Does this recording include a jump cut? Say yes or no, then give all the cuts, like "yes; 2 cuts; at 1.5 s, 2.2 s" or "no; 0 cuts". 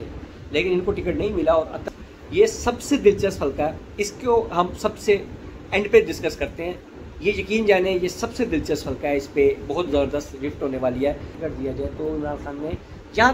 yes; 2 cuts; at 1.8 s, 11.3 s